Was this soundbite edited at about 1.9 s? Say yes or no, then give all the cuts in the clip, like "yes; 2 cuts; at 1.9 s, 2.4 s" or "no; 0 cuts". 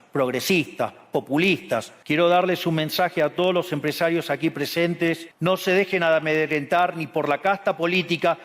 yes; 2 cuts; at 1.9 s, 5.3 s